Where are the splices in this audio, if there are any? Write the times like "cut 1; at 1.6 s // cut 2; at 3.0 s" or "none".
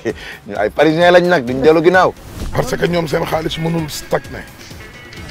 cut 1; at 2.3 s